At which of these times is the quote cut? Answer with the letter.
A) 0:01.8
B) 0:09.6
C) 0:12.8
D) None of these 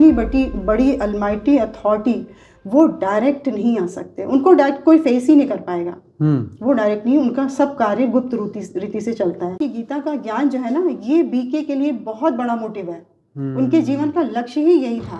B